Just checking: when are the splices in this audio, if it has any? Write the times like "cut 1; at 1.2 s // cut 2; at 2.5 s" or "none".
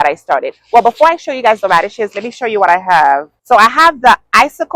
cut 1; at 3.3 s